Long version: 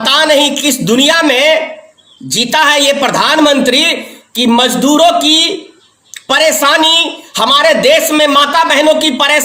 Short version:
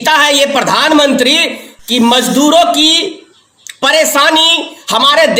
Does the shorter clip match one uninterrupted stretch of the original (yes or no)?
yes